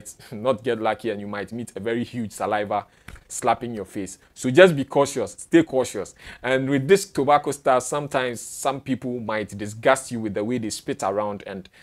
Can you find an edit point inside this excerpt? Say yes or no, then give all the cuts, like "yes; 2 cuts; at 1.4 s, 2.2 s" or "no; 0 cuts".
no; 0 cuts